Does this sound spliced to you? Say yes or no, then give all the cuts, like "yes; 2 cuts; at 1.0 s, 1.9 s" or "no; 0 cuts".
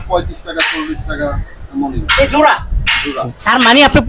no; 0 cuts